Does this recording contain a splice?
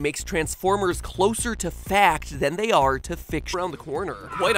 no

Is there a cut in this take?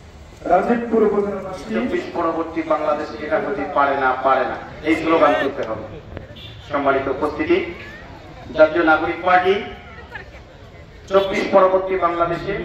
yes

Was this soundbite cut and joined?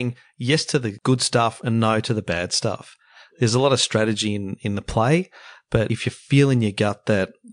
yes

